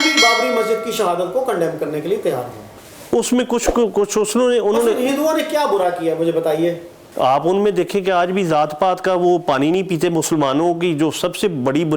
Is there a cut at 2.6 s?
yes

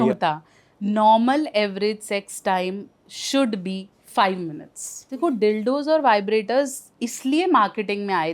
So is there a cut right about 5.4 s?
yes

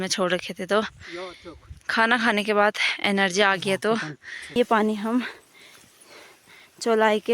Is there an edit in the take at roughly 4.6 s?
yes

